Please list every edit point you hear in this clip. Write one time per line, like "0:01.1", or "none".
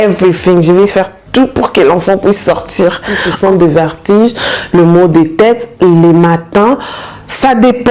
0:03.2